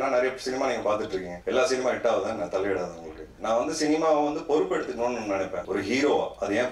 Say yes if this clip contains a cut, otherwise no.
yes